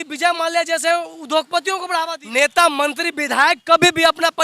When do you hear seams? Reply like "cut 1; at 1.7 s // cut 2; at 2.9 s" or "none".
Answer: cut 1; at 2.2 s